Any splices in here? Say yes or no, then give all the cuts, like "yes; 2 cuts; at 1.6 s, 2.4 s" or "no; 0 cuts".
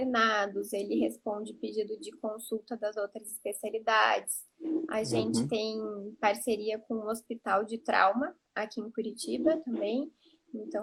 no; 0 cuts